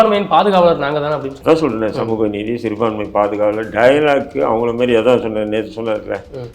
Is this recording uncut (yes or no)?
no